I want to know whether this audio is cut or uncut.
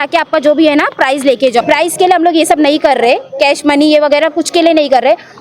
cut